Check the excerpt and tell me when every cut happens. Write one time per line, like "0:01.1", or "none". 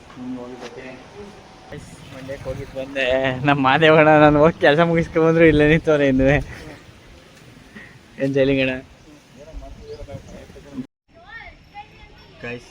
0:01.7
0:10.7

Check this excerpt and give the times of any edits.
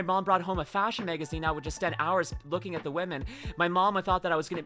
none

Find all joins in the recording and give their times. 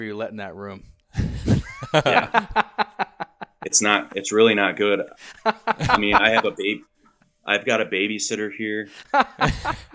none

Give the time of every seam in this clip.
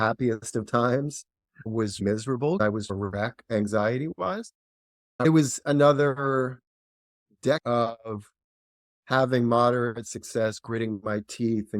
0:02.6
0:05.2

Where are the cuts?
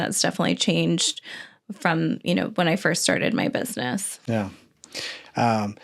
none

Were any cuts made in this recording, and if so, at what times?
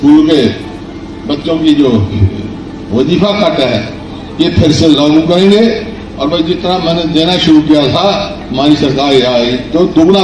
none

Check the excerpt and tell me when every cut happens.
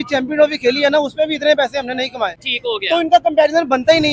none

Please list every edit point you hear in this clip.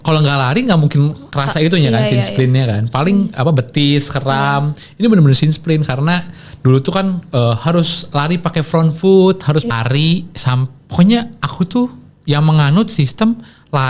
0:09.7

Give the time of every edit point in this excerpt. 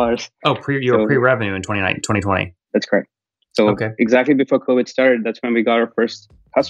0:02.6

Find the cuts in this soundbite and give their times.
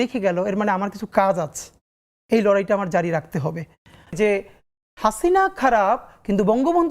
0:04.1

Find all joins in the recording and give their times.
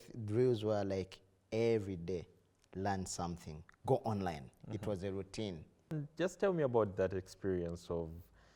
0:05.9

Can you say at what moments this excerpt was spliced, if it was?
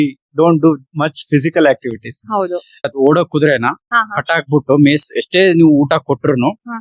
0:02.9

